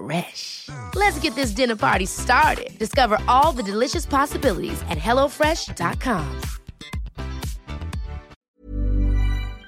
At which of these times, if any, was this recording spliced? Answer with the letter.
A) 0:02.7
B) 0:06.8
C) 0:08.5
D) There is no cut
C